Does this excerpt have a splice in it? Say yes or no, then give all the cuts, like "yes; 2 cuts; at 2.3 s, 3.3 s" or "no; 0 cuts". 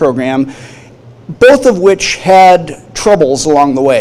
yes; 1 cut; at 1.1 s